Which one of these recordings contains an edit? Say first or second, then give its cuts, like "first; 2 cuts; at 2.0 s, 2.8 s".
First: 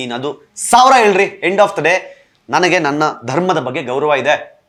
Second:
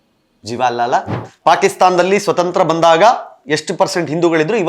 second; 1 cut; at 1.2 s